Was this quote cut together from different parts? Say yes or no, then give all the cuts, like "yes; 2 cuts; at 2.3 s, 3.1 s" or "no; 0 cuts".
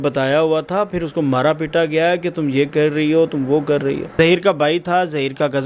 yes; 1 cut; at 4.1 s